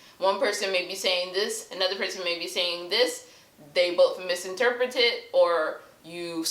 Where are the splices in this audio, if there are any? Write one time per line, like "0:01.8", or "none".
none